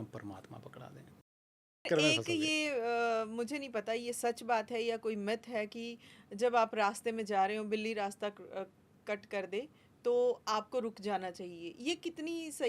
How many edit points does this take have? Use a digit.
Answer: 1